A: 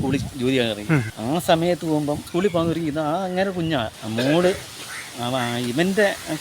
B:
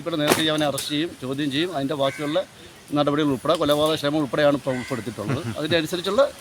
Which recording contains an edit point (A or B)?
A